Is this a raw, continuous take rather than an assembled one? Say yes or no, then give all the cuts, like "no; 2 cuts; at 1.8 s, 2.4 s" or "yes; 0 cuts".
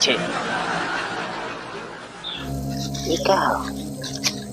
no; 1 cut; at 2.4 s